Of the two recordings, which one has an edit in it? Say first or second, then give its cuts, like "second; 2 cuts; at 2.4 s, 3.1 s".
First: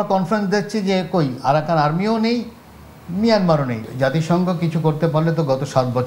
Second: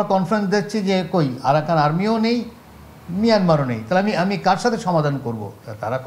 first; 1 cut; at 3.8 s